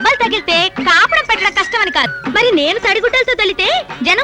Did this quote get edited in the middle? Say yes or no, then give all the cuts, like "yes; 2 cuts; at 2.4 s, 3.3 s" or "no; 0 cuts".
yes; 1 cut; at 2.1 s